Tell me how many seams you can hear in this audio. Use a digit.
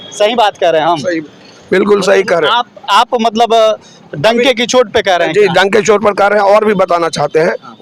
0